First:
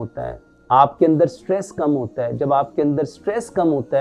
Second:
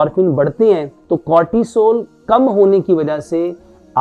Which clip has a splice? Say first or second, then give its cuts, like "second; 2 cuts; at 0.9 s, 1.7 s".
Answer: second; 1 cut; at 0.9 s